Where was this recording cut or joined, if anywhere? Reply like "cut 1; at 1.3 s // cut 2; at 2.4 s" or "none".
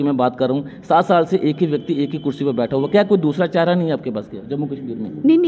none